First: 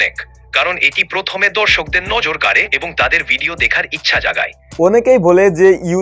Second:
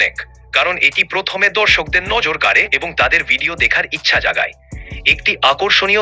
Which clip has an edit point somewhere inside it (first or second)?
first